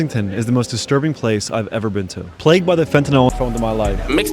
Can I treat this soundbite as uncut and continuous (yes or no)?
no